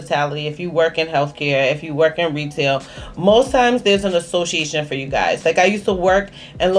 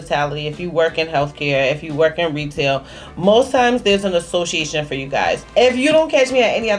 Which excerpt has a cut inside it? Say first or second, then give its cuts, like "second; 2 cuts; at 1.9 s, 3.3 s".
second; 1 cut; at 5.4 s